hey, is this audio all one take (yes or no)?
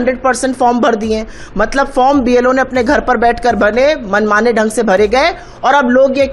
yes